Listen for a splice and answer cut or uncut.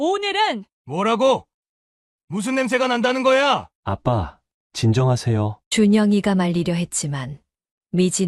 cut